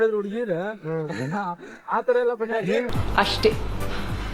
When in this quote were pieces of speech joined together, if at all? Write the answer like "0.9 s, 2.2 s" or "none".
3.0 s

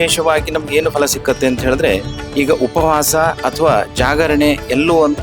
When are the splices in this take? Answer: 2.2 s, 3.4 s

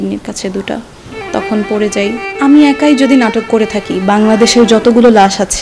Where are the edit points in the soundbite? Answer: 2.2 s

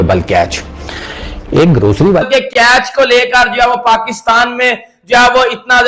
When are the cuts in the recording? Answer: 2.2 s

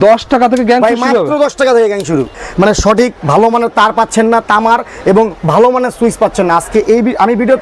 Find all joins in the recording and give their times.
2.4 s

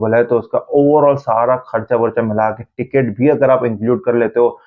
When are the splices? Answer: none

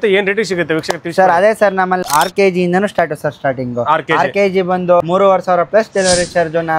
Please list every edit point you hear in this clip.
2.0 s, 5.0 s

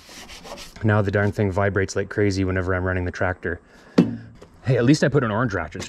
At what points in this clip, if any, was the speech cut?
4.3 s

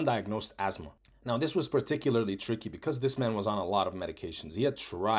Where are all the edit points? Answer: 1.1 s

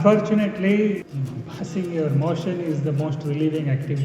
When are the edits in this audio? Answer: 1.1 s

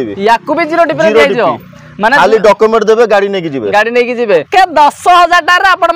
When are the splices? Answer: 4.5 s

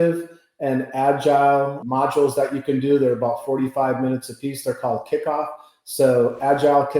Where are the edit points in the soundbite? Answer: 1.8 s

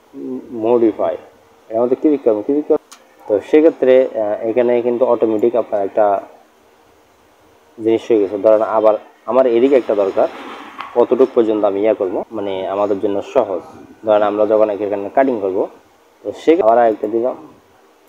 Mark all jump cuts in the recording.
2.8 s, 12.3 s, 16.6 s

